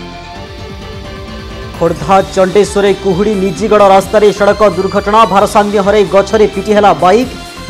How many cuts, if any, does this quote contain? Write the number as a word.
zero